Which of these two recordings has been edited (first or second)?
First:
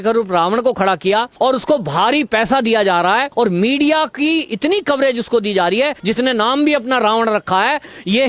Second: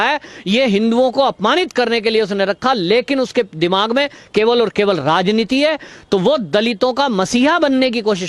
first